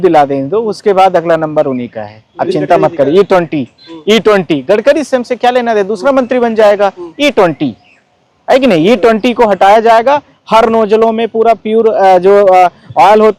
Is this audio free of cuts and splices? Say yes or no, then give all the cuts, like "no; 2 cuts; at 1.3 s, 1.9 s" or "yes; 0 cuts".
yes; 0 cuts